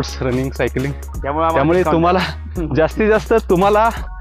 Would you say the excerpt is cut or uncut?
uncut